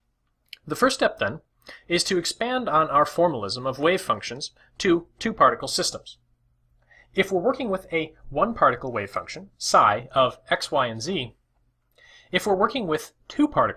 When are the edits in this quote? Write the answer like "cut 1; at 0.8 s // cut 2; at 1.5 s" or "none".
cut 1; at 8.8 s